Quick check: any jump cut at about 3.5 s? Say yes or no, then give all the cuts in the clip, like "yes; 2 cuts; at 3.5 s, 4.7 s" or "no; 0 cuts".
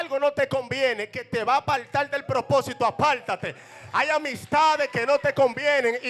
no; 0 cuts